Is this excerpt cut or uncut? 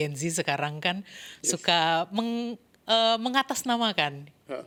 uncut